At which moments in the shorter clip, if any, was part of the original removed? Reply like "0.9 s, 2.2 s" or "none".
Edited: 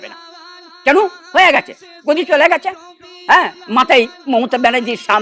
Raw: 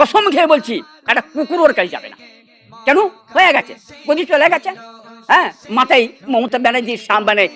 none